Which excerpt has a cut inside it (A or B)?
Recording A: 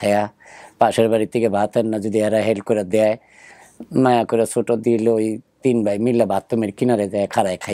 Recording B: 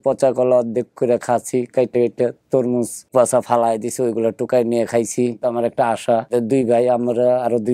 B